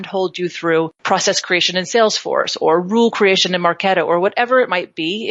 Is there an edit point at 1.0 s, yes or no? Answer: yes